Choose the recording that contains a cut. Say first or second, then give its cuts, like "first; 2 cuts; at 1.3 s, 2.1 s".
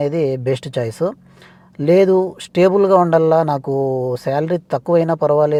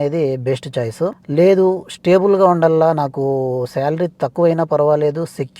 second; 1 cut; at 1.2 s